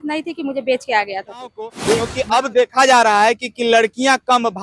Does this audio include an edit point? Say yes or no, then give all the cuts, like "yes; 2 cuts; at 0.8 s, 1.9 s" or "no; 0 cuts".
yes; 1 cut; at 1.9 s